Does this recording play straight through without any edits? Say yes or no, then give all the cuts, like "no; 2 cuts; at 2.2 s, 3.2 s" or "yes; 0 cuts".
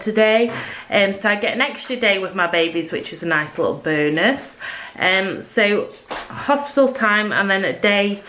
yes; 0 cuts